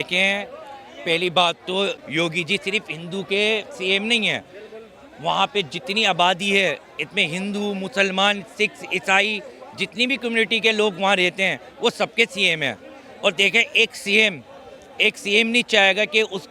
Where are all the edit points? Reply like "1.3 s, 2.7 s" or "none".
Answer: 2.0 s